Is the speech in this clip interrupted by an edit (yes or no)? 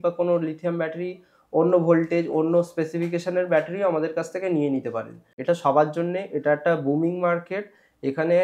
yes